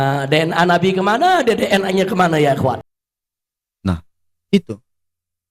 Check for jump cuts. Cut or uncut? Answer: uncut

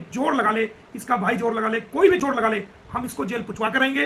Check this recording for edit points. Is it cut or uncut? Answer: uncut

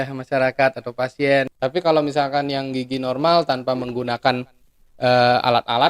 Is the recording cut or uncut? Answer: cut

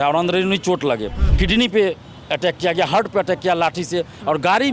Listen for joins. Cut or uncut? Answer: cut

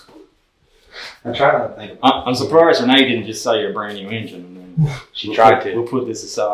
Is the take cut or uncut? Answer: uncut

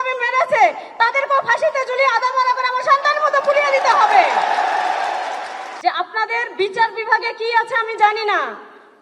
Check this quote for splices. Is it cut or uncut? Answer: cut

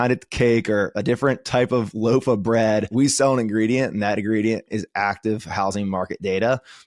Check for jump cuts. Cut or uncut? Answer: cut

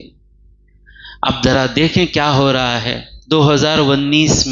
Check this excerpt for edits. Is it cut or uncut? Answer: uncut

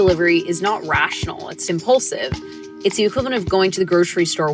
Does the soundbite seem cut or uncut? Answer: cut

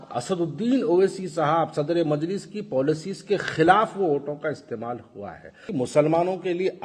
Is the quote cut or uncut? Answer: cut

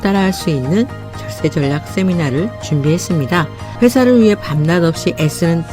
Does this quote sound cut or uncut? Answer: cut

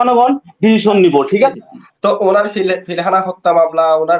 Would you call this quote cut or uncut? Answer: cut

